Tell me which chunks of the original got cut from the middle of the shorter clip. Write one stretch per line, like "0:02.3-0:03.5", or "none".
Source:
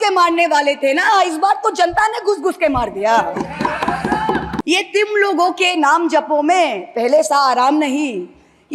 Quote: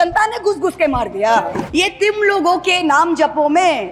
0:03.5-0:04.6